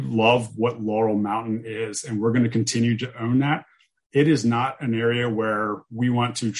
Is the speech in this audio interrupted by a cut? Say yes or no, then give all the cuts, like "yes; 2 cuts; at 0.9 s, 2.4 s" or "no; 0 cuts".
no; 0 cuts